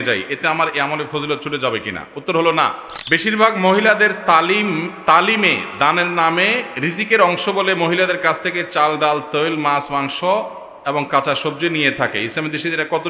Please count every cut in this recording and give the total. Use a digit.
1